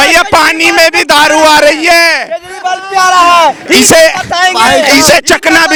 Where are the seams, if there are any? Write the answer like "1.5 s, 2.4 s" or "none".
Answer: none